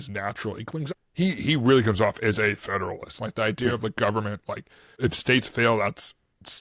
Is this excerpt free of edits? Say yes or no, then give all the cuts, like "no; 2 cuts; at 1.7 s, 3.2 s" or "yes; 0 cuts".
no; 2 cuts; at 0.9 s, 5.0 s